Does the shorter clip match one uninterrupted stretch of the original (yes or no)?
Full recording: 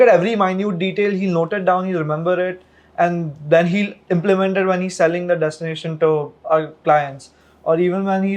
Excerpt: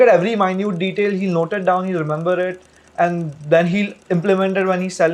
yes